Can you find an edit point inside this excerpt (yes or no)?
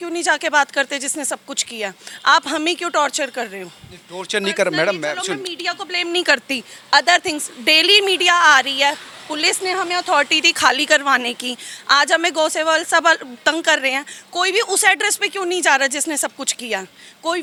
no